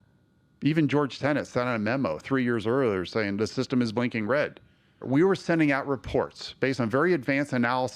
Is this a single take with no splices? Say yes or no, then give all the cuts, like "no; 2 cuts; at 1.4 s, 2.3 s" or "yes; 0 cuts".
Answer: no; 1 cut; at 5.0 s